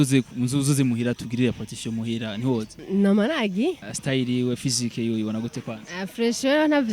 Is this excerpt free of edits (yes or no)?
no